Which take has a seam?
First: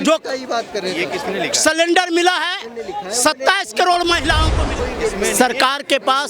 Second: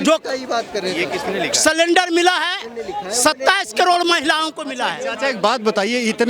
first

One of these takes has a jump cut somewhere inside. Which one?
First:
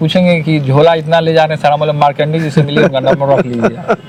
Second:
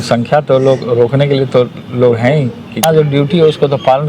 second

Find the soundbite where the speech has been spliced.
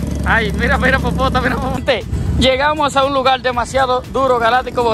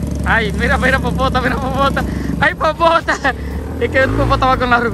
first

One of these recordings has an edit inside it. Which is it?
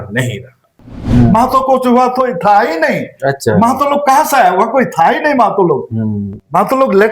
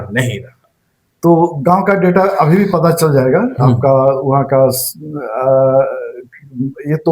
first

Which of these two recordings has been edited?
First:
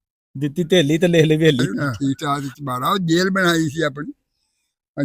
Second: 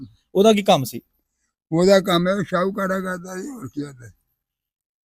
first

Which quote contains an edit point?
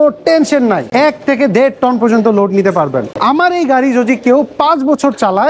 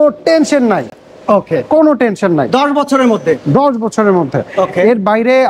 first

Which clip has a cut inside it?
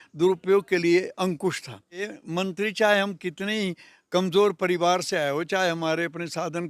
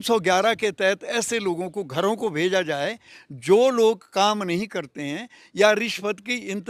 first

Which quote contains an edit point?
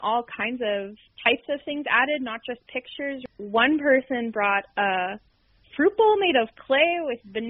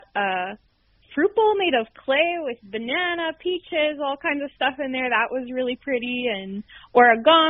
first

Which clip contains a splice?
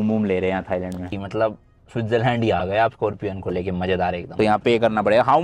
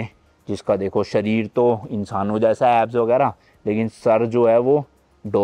first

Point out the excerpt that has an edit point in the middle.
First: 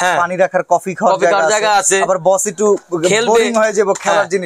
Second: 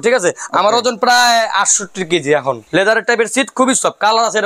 second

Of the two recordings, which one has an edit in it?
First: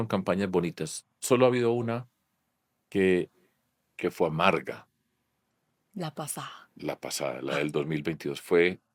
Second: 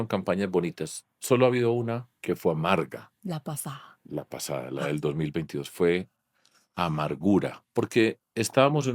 second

